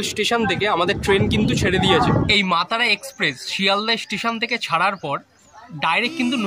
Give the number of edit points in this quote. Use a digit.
1